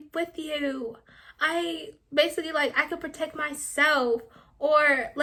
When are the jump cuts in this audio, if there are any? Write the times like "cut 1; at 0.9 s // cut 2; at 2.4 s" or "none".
none